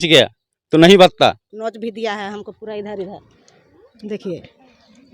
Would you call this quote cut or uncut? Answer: cut